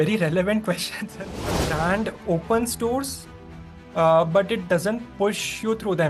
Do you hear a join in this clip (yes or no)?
yes